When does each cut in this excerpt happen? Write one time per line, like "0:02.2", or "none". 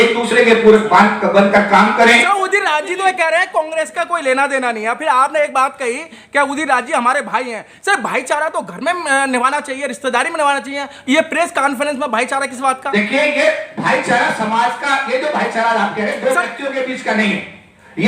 0:02.3